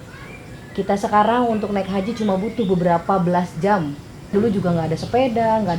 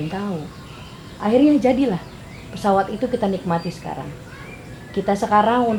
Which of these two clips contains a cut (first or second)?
first